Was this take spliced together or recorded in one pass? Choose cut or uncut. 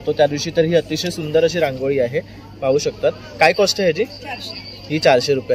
uncut